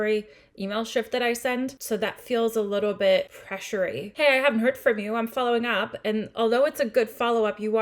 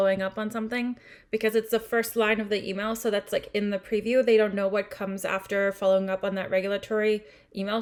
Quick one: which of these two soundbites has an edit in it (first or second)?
first